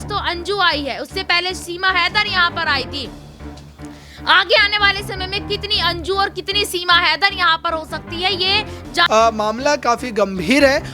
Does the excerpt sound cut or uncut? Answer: cut